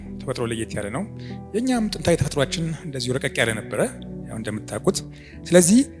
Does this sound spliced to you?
no; 0 cuts

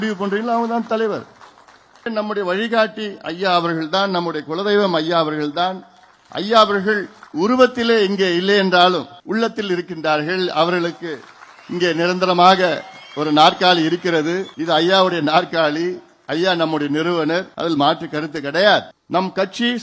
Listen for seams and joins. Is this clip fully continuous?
no; 6 cuts; at 2.1 s, 7.2 s, 9.1 s, 14.5 s, 17.5 s, 19.0 s

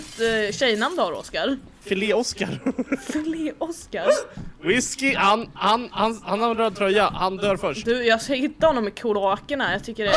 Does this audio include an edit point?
yes; 1 cut; at 1.7 s

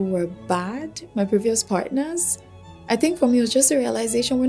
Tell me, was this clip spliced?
no; 0 cuts

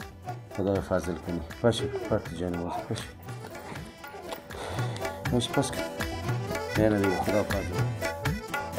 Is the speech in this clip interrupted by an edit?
yes; 1 cut; at 7.7 s

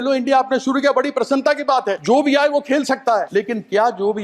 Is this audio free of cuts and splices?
no; 2 cuts; at 2.0 s, 3.3 s

